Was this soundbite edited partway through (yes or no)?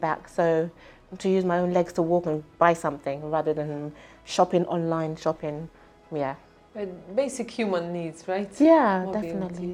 no